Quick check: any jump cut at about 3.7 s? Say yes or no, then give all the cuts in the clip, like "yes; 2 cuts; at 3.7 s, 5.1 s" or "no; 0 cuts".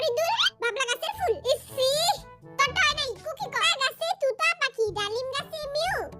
yes; 1 cut; at 3.7 s